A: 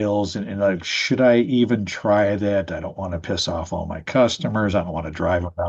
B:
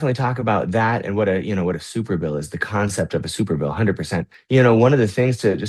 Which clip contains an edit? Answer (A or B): B